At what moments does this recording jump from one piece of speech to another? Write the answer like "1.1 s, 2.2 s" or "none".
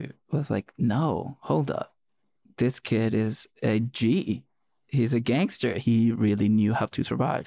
5.8 s